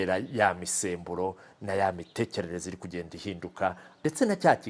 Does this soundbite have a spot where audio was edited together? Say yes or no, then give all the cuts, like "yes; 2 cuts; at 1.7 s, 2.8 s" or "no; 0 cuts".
no; 0 cuts